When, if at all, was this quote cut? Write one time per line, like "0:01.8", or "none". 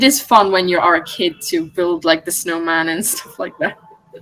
none